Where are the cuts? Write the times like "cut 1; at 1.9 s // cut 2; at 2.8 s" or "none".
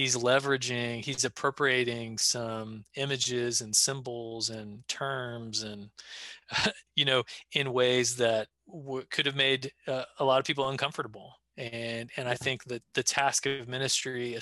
cut 1; at 8.6 s

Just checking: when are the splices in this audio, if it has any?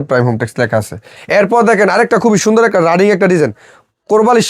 cut 1; at 1.1 s

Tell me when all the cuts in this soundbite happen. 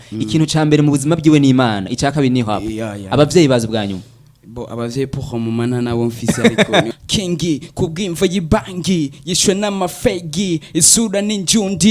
cut 1; at 6.9 s

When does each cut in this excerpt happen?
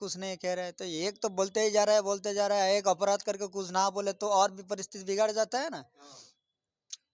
none

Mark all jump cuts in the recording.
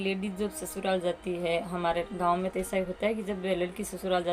none

